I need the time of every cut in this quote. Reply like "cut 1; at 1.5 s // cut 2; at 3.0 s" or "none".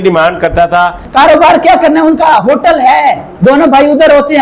cut 1; at 1.0 s // cut 2; at 3.3 s